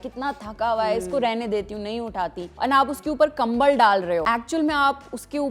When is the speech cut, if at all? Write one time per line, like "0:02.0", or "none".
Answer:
0:02.4
0:04.2